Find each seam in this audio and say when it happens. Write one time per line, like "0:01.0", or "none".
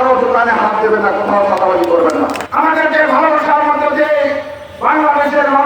0:02.4